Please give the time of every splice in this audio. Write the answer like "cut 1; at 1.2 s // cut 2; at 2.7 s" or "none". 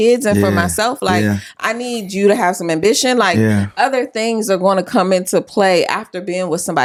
none